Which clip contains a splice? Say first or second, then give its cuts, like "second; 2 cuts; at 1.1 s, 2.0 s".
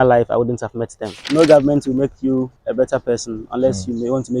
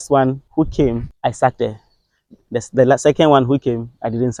first; 1 cut; at 1.2 s